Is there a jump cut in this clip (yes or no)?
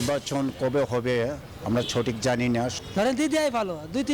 yes